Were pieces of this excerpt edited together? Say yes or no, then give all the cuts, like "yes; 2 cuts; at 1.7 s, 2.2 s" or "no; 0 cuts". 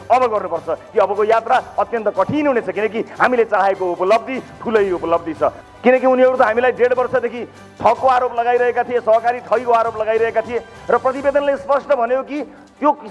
yes; 1 cut; at 5.6 s